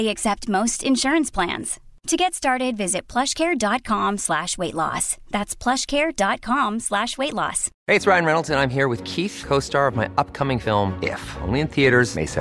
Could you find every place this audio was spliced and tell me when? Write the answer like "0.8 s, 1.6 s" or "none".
none